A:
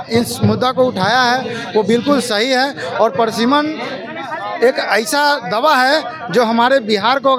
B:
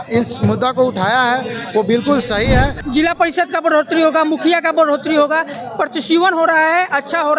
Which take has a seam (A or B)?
B